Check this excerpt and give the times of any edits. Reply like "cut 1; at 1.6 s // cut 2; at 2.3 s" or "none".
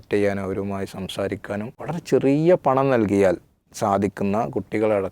cut 1; at 1.7 s